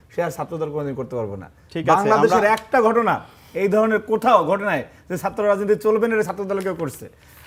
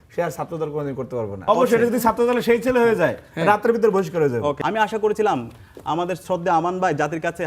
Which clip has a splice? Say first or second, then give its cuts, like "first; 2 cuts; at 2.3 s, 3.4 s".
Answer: second; 2 cuts; at 1.4 s, 4.6 s